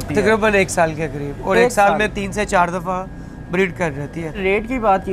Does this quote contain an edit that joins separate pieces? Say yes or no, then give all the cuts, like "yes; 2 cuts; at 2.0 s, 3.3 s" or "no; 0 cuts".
no; 0 cuts